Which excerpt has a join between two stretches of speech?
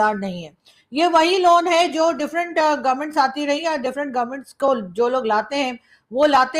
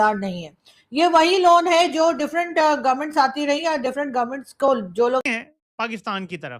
second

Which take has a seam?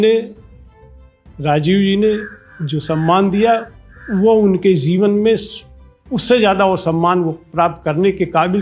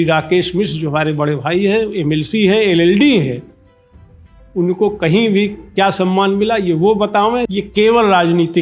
second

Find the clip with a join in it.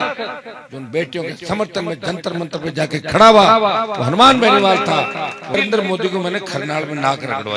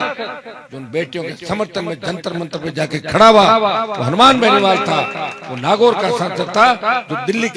first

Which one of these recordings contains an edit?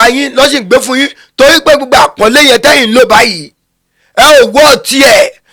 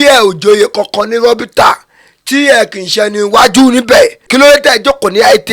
second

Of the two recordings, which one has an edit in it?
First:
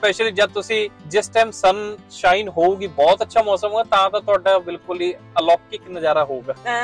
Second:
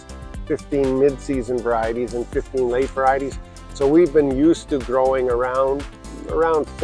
first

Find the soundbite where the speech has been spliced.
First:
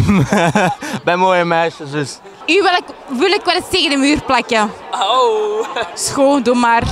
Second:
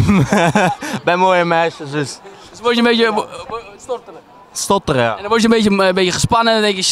first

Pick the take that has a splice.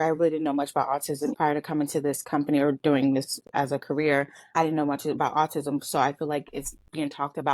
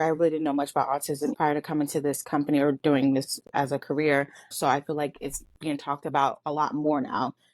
second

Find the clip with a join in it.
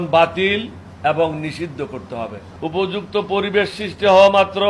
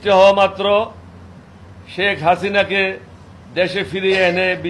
first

